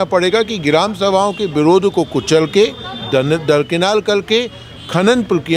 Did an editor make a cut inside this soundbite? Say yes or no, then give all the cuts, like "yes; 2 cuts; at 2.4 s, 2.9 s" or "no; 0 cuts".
no; 0 cuts